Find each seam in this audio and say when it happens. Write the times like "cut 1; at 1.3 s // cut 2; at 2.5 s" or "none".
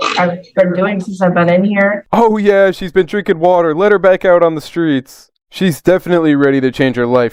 none